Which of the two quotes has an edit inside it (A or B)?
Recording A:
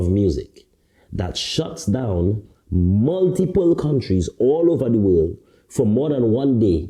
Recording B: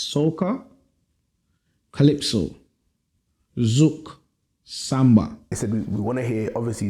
B